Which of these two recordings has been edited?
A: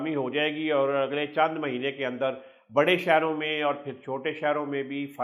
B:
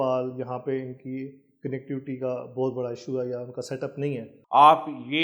B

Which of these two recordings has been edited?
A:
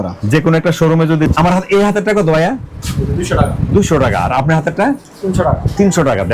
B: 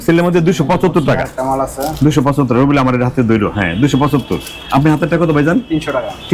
A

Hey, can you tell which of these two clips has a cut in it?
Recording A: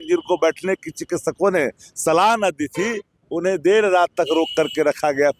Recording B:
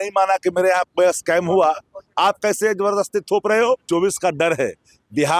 B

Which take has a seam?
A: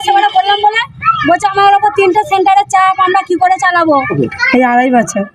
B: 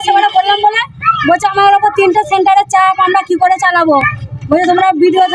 A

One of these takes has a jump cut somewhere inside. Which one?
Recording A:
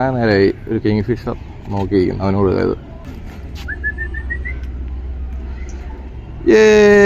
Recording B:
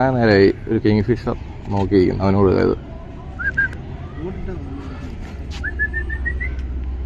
A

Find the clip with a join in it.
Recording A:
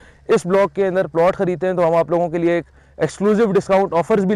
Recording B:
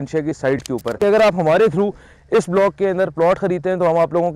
B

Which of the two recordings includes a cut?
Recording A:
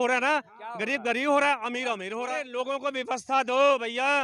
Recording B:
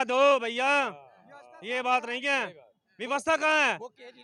A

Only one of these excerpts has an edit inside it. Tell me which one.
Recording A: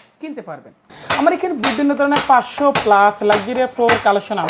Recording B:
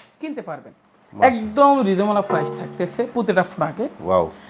A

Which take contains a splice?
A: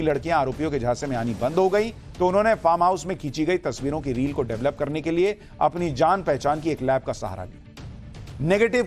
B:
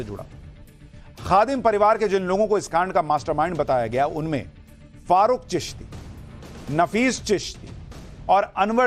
A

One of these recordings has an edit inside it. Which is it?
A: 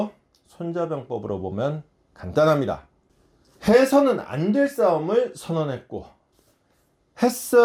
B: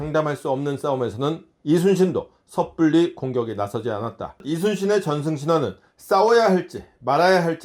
B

